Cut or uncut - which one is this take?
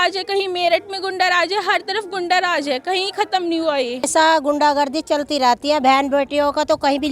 cut